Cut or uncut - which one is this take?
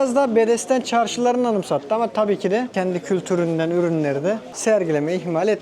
cut